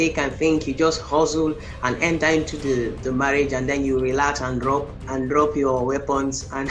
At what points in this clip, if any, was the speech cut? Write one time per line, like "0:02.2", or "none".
none

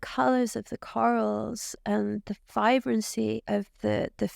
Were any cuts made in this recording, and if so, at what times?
0:03.4

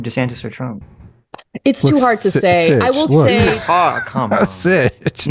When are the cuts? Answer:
none

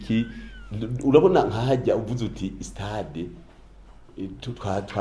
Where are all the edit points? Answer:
none

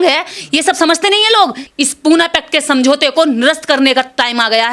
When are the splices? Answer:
0:01.6

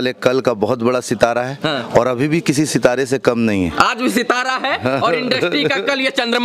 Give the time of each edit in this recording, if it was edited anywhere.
none

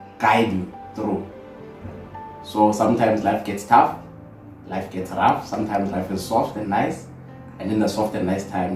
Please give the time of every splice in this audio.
none

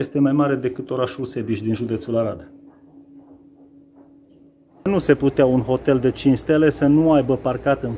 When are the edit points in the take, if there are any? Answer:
0:04.9

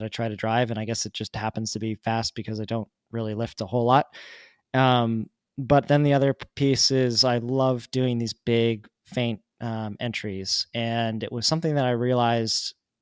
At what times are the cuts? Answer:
none

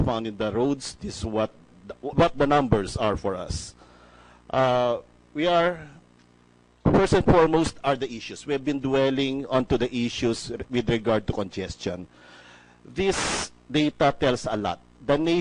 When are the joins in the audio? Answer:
none

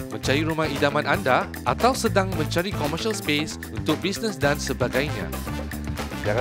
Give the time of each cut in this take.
none

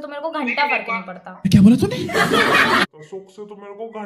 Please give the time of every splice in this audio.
0:01.3

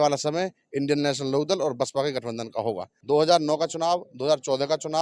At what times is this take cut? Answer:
0:02.9

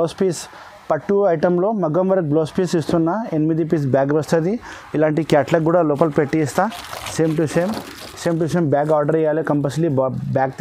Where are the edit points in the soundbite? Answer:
none

